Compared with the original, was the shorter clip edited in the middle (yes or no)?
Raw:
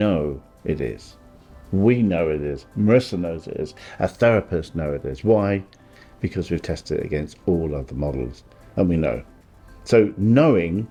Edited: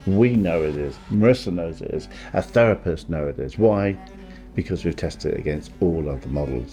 no